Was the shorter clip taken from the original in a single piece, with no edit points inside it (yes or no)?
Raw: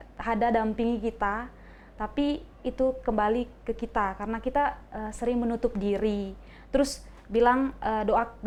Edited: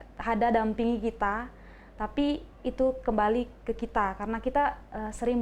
yes